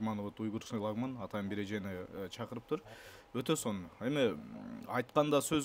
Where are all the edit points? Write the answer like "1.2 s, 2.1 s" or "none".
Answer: none